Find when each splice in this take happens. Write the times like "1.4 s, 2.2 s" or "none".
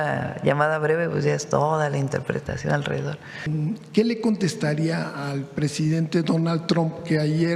3.5 s